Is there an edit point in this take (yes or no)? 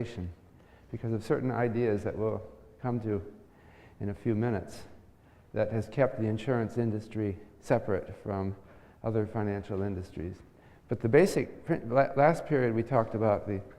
yes